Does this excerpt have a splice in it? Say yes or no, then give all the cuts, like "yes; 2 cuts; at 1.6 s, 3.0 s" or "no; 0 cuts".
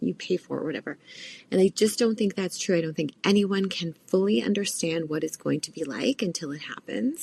no; 0 cuts